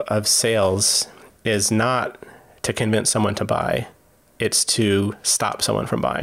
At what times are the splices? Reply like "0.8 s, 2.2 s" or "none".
none